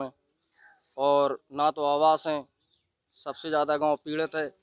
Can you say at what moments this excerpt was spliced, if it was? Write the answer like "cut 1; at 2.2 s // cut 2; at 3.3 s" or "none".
none